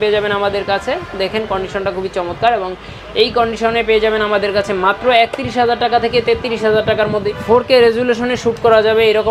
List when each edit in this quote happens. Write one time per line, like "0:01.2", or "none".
0:07.3

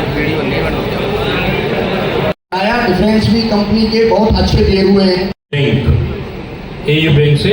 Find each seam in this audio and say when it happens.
0:02.4
0:05.5

